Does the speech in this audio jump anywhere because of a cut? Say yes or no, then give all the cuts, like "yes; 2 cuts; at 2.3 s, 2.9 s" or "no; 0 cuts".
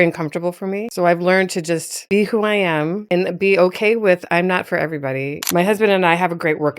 yes; 3 cuts; at 0.9 s, 3.0 s, 5.4 s